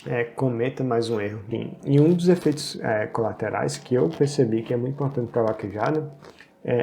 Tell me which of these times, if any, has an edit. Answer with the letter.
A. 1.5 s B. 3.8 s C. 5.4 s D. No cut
A